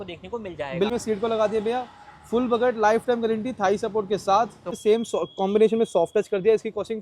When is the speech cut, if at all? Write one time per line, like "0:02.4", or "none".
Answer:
0:00.9
0:04.8